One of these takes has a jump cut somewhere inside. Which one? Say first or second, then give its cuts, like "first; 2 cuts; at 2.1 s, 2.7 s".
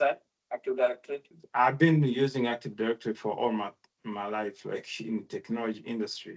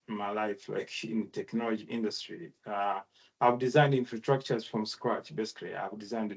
first; 1 cut; at 1.4 s